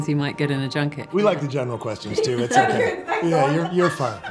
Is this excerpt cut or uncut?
cut